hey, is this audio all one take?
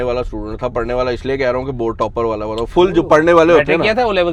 yes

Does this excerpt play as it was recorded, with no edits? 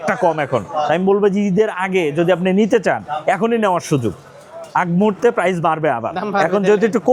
yes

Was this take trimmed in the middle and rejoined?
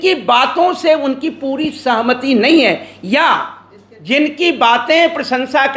no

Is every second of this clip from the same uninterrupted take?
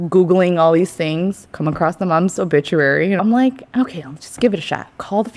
no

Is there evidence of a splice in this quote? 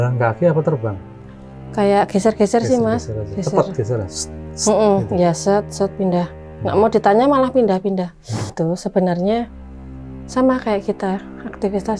yes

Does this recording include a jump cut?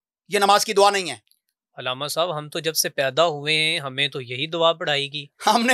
no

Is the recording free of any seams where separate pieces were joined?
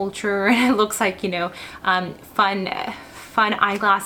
yes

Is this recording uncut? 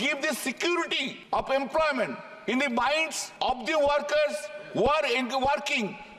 no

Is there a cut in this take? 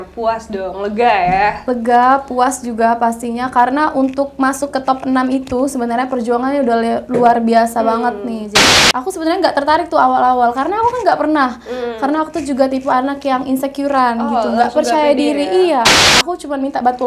yes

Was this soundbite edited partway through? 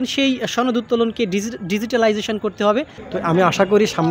yes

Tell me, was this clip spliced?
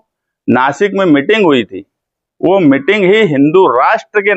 no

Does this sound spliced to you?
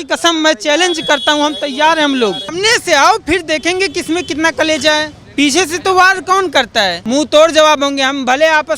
yes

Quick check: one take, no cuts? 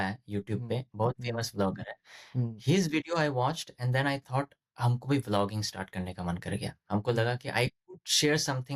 yes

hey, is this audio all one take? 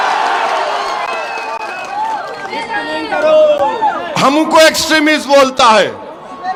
yes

